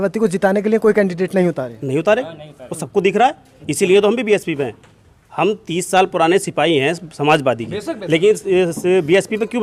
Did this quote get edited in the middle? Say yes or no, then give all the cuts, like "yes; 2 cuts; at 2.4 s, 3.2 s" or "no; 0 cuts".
no; 0 cuts